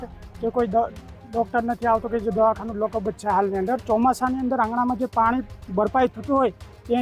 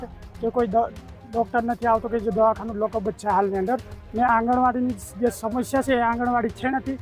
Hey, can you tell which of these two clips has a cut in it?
first; 1 cut; at 3.8 s

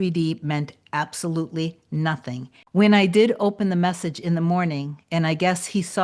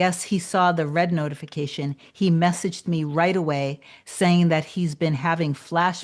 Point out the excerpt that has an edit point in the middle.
first; 1 cut; at 2.5 s

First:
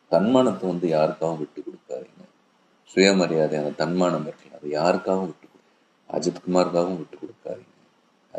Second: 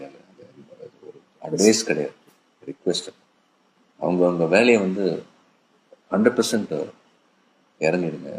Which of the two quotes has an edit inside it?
second; 1 cut; at 4.6 s

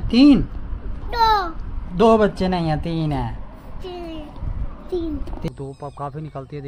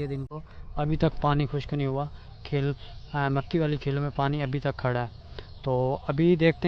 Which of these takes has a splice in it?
first; 2 cuts; at 3.4 s, 5.5 s

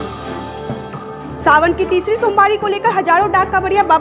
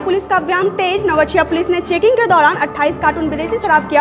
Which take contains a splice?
first; 1 cut; at 1.0 s

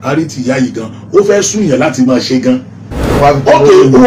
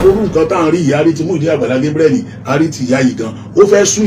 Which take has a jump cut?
first; 1 cut; at 3.2 s

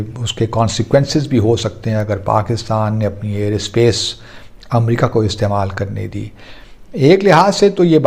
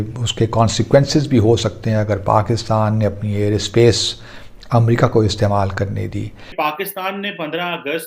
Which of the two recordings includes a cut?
second; 1 cut; at 6.4 s

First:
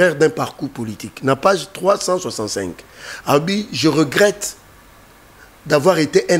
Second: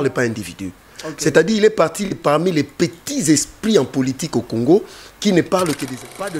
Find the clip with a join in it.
second; 1 cut; at 5.5 s

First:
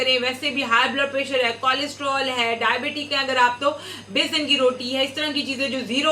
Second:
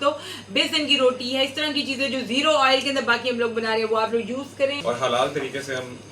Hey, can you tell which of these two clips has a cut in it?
second; 1 cut; at 4.4 s

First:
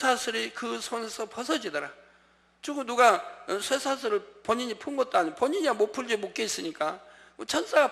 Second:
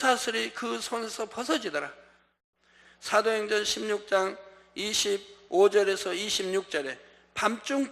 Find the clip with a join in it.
second; 1 cut; at 2.5 s

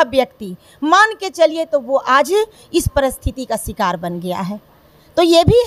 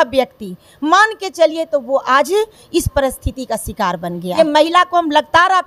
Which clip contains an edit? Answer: second; 1 cut; at 4.3 s

